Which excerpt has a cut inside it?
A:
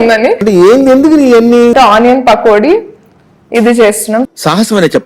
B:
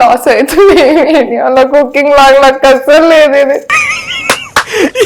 A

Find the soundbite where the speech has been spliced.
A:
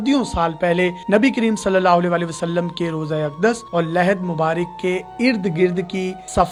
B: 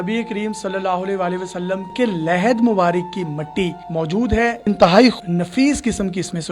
B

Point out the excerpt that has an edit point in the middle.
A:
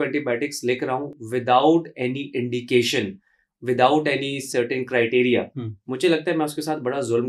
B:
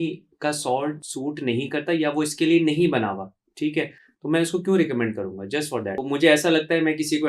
B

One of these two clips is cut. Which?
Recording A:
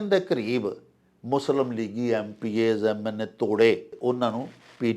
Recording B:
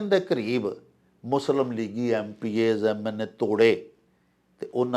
A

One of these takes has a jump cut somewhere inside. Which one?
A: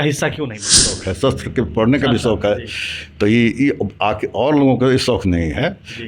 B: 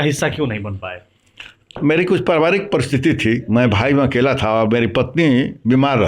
A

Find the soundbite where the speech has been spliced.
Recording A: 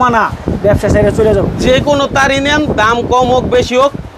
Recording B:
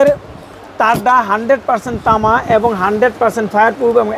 A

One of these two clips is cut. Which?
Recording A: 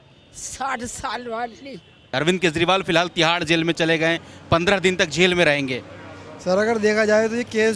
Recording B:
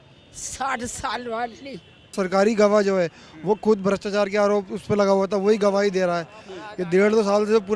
B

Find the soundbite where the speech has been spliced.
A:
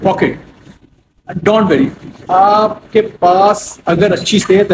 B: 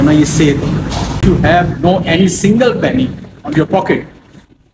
B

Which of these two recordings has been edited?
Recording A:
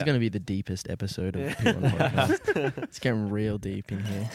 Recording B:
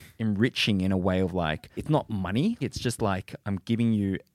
B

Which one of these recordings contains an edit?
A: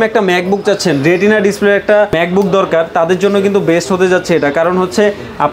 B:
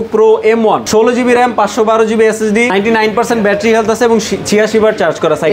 B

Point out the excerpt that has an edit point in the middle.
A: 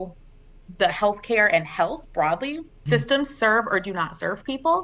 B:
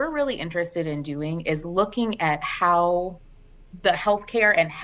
A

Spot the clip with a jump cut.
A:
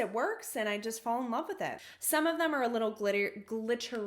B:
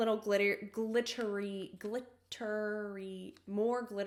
A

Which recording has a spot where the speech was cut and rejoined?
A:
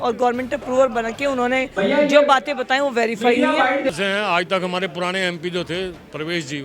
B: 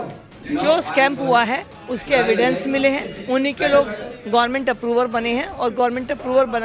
A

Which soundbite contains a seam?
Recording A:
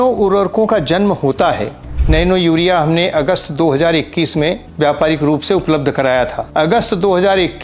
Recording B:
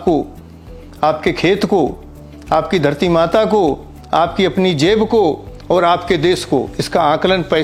A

